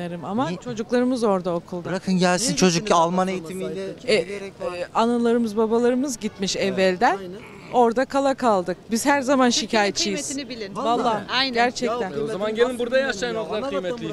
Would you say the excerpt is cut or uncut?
uncut